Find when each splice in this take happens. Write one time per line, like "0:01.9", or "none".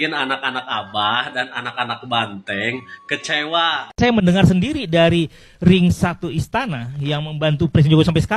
0:03.9